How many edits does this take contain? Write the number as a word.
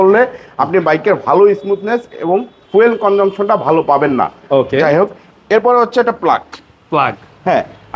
zero